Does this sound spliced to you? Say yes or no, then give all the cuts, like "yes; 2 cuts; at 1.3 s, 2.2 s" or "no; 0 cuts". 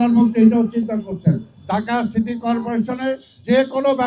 yes; 1 cut; at 1.5 s